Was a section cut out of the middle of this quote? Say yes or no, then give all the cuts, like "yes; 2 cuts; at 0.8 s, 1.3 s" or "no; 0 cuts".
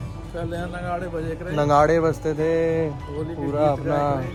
no; 0 cuts